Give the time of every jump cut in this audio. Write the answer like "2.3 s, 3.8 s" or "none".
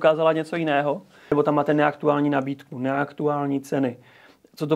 1.3 s